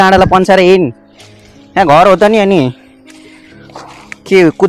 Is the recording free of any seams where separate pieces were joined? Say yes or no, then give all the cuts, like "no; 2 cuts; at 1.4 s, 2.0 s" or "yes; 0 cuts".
yes; 0 cuts